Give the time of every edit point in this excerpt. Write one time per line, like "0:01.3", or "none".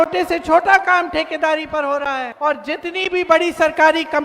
0:02.3